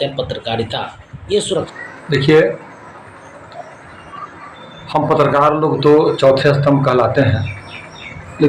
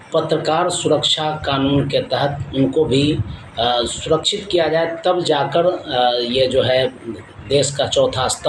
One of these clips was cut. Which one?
first; 1 cut; at 1.8 s

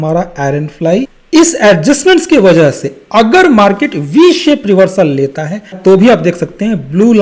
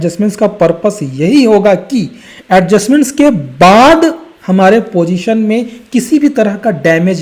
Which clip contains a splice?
first; 2 cuts; at 1.2 s, 5.8 s

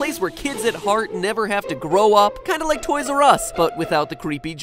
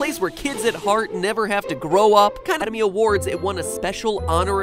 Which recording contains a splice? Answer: first; 1 cut; at 2.6 s

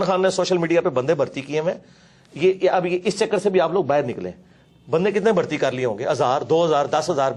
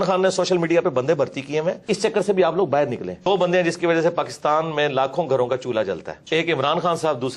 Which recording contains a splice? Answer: second; 3 cuts; at 1.8 s, 3.2 s, 6.1 s

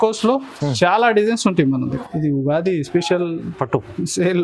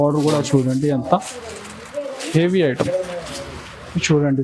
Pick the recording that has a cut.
first; 1 cut; at 2.0 s

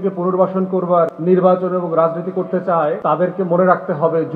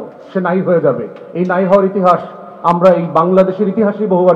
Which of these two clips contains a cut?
first; 2 cuts; at 1.2 s, 3.0 s

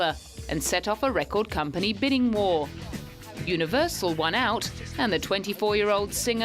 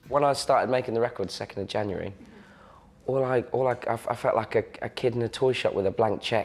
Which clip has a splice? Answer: first; 1 cut; at 1.5 s

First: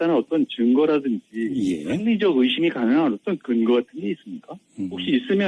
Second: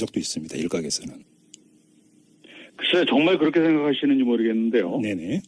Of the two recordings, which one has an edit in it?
first; 1 cut; at 3.0 s

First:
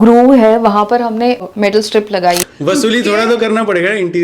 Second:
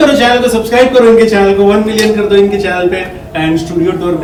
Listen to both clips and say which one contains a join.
first; 2 cuts; at 1.4 s, 2.5 s

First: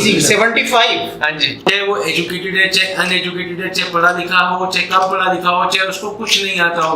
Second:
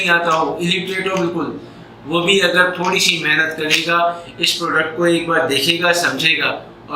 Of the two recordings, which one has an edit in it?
first; 1 cut; at 1.5 s

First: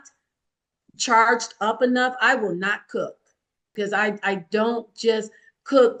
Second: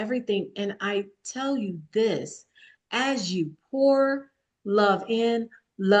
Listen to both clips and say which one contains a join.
first; 1 cut; at 3.7 s

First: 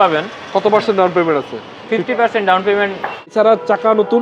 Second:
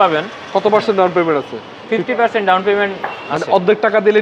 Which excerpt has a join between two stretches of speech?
first; 1 cut; at 3.2 s

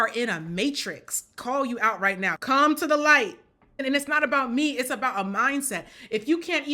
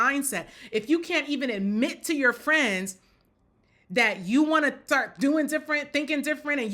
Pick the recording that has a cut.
first; 2 cuts; at 2.3 s, 3.8 s

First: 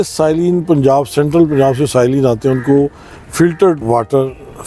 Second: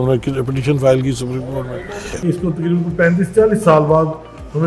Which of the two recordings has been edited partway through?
second; 1 cut; at 2.1 s

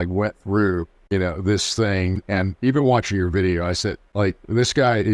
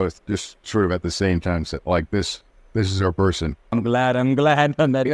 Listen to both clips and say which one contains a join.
first; 3 cuts; at 0.9 s, 2.2 s, 4.0 s

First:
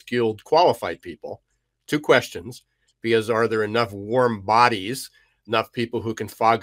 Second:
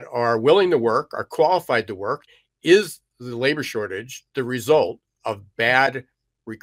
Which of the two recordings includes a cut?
second; 1 cut; at 2.2 s

